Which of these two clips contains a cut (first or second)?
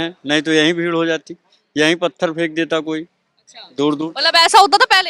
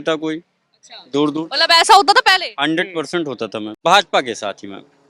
second